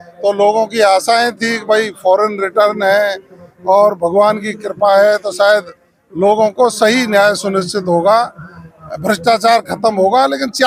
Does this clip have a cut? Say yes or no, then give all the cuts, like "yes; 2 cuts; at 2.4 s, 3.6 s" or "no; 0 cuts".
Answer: no; 0 cuts